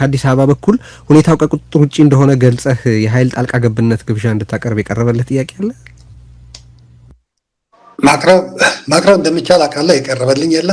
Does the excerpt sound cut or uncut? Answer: uncut